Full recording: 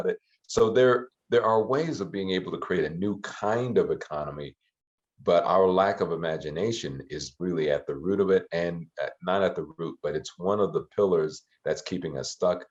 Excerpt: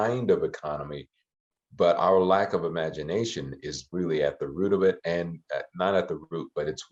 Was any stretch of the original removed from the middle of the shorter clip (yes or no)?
no